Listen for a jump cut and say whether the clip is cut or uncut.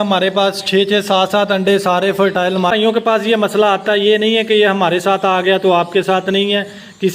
cut